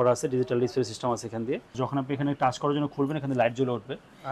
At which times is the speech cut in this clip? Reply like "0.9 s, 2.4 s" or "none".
1.7 s

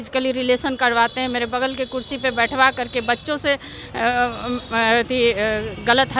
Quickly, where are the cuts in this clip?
none

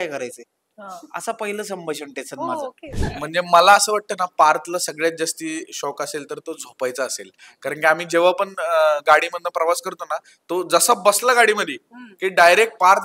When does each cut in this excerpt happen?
3.0 s

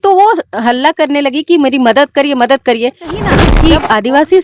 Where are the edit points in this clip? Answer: 3.4 s

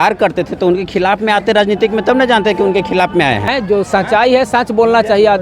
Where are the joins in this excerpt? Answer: 3.5 s

